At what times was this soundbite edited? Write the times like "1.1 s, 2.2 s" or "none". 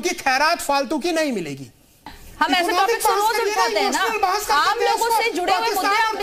2.0 s